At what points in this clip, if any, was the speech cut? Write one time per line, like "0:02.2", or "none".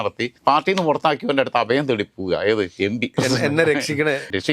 none